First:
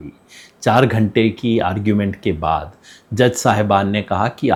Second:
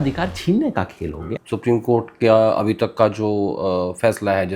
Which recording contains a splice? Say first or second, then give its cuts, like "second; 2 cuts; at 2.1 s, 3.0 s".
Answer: second; 1 cut; at 1.2 s